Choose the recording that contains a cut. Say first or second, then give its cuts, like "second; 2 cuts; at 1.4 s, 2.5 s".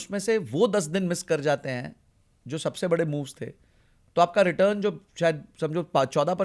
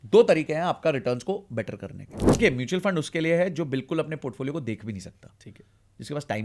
second; 1 cut; at 2.4 s